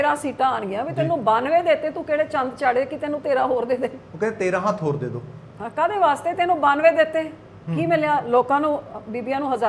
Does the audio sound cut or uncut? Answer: uncut